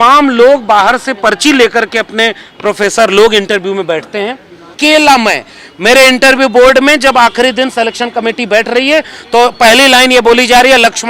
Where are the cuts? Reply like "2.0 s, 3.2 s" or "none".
4.8 s